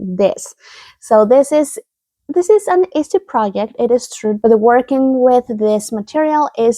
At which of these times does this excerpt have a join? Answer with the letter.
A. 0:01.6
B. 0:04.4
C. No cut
B